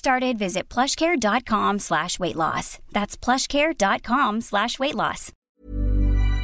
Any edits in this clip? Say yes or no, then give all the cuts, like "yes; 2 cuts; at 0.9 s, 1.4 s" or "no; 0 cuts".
yes; 1 cut; at 5.3 s